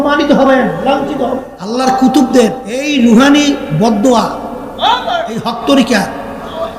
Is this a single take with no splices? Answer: no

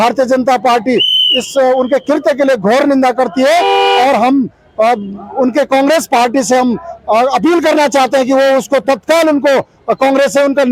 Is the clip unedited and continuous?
yes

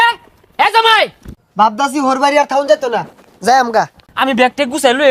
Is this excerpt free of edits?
no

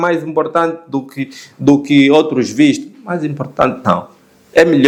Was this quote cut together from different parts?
no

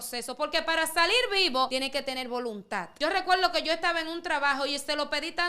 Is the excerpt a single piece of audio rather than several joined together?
no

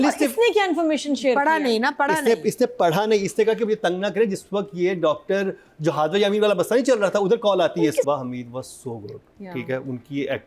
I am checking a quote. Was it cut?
yes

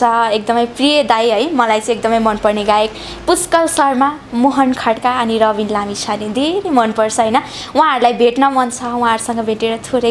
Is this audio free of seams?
yes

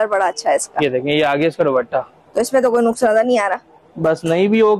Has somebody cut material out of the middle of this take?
no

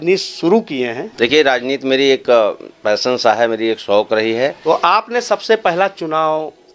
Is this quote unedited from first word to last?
no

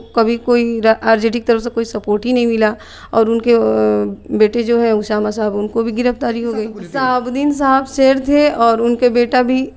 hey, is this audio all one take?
no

